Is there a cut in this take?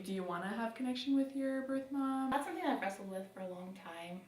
yes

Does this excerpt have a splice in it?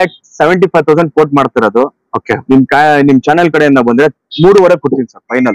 no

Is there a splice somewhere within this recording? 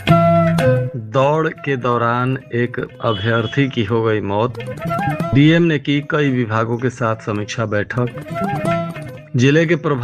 yes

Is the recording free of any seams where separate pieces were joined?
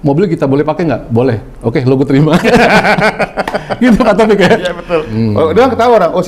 no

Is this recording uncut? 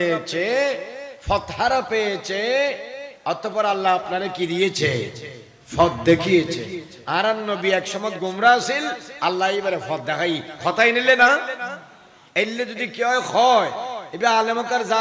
yes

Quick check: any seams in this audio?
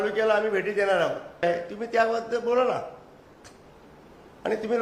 yes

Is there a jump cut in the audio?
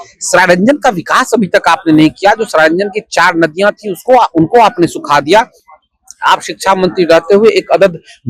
no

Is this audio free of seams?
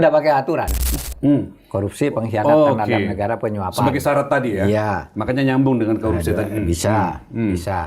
no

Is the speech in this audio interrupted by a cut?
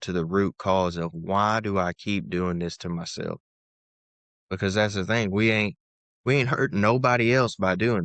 no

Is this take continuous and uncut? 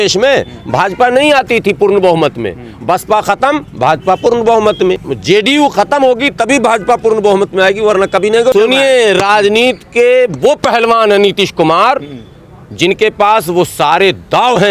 no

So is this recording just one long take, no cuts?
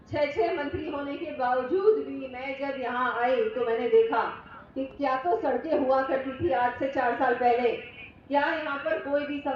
yes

